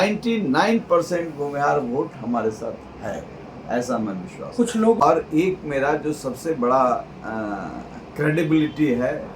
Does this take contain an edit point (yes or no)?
yes